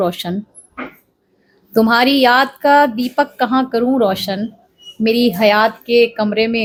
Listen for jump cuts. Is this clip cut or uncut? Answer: uncut